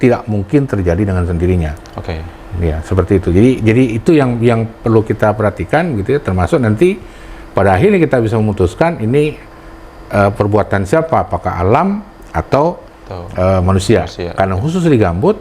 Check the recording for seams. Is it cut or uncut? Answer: uncut